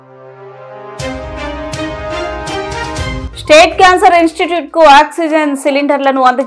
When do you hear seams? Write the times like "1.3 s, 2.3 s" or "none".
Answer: none